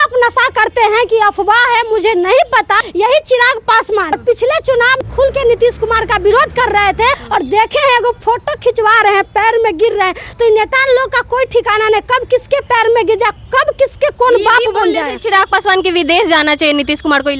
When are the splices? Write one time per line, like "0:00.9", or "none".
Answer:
0:02.8
0:04.1
0:05.0
0:07.2